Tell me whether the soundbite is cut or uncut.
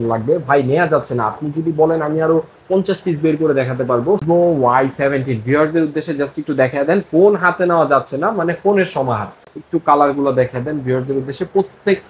cut